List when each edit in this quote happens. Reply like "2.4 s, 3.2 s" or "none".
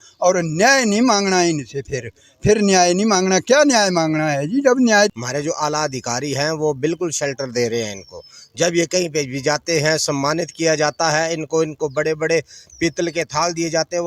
5.2 s